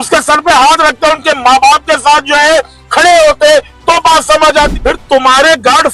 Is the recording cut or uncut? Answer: cut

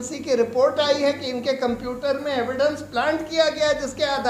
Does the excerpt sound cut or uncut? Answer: uncut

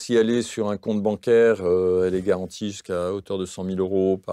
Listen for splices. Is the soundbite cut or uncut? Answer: uncut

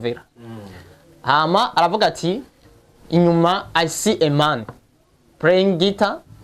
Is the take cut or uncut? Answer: uncut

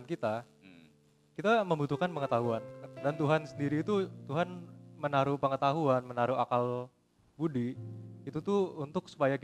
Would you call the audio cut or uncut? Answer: uncut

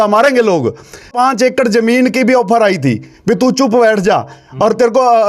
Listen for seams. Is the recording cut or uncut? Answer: cut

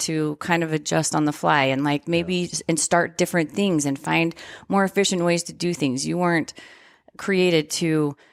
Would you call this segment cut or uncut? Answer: uncut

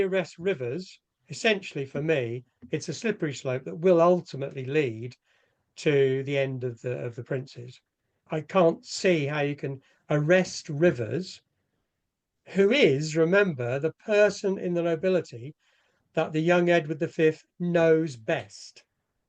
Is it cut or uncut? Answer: cut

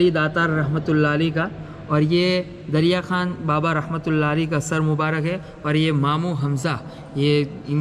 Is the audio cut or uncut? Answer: uncut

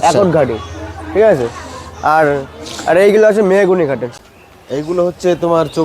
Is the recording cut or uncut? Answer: cut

